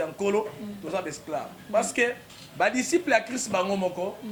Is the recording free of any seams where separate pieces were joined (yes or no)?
yes